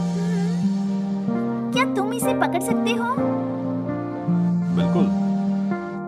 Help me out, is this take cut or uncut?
cut